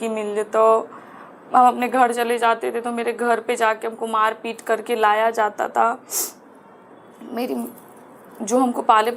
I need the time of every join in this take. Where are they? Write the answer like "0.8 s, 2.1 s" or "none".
none